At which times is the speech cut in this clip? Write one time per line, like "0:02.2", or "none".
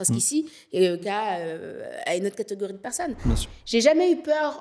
0:01.0
0:03.4